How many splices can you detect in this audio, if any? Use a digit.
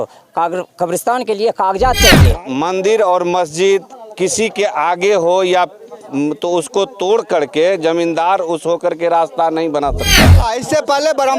2